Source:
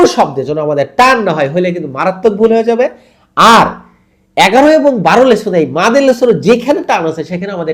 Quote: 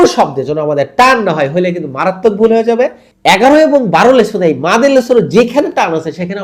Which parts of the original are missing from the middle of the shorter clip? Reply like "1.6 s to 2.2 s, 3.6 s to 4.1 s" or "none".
3.1 s to 4.2 s